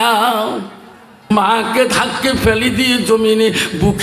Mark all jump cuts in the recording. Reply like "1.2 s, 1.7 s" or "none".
1.3 s